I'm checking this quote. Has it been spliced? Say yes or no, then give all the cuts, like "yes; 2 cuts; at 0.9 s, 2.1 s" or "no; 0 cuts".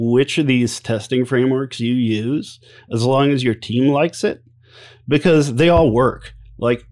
no; 0 cuts